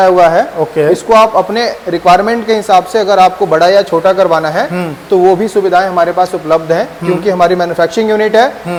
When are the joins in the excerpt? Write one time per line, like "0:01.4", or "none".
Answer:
none